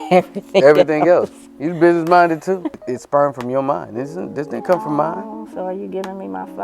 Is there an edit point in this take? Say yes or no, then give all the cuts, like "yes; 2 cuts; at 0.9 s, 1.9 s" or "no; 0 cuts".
yes; 1 cut; at 2.8 s